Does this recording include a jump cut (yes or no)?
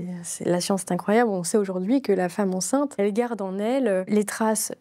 yes